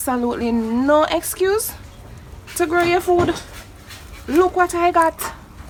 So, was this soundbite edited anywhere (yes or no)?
no